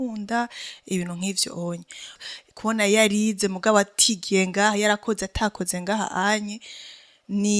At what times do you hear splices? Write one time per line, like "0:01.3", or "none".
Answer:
0:02.2